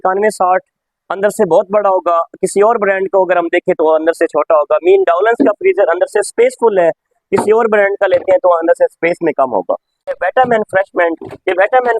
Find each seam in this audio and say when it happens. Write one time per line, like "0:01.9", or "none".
0:10.1